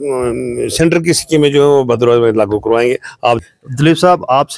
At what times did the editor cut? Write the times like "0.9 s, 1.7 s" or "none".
3.4 s